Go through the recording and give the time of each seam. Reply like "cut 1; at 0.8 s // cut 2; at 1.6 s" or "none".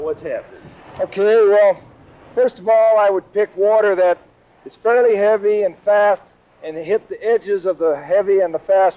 cut 1; at 7.2 s